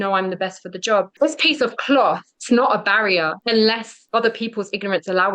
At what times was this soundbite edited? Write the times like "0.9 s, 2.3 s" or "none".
1.1 s, 2.3 s, 3.4 s, 3.9 s